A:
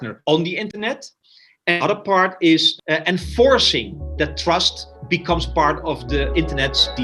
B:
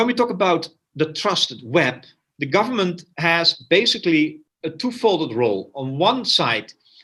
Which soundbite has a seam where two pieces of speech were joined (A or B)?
A